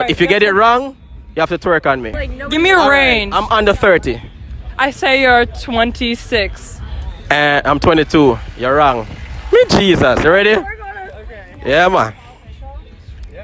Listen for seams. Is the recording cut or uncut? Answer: cut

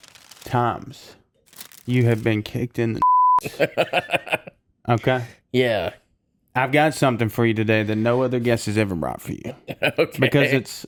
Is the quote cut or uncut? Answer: uncut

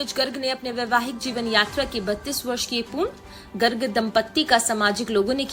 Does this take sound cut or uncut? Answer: uncut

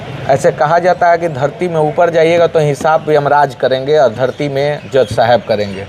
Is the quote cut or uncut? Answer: uncut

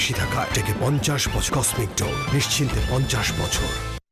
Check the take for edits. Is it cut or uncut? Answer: cut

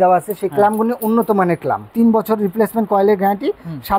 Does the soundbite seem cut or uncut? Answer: cut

